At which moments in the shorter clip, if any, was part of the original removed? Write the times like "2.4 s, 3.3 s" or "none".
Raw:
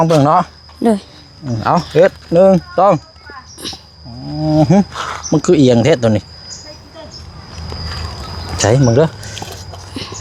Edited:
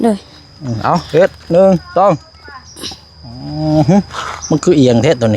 none